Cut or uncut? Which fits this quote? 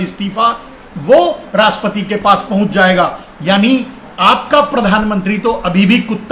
uncut